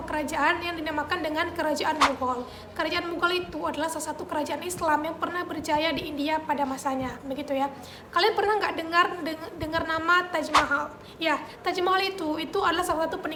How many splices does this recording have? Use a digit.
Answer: 0